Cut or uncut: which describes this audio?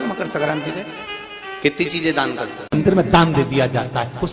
cut